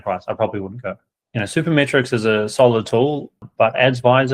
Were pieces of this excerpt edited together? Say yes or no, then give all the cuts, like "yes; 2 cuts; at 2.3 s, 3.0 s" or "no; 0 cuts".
yes; 2 cuts; at 1.1 s, 3.4 s